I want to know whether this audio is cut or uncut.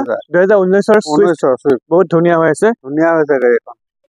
uncut